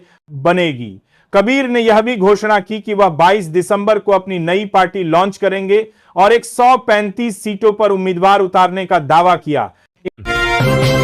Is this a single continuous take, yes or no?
no